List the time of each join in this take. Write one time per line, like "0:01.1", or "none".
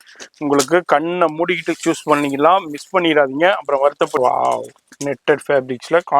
0:04.1